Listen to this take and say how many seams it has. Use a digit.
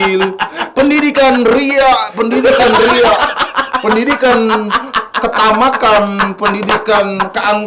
0